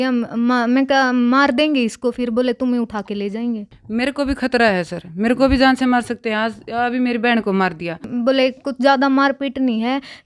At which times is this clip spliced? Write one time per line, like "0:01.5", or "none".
0:03.7
0:08.1